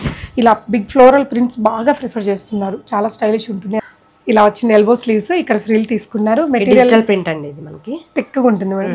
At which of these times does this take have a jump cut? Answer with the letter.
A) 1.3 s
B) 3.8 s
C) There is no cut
B